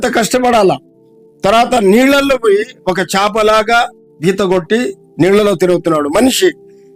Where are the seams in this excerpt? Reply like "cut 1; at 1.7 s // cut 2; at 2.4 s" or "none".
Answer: none